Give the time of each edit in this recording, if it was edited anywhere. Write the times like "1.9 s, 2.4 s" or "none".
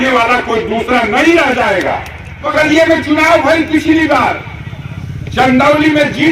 2.5 s